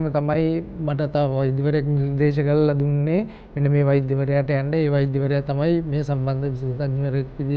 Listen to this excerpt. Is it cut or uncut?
uncut